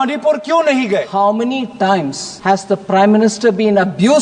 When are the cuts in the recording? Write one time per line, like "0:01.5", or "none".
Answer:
0:01.1
0:02.2